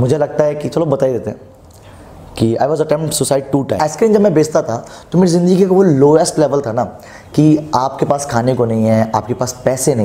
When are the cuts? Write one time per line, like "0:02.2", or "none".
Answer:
0:03.8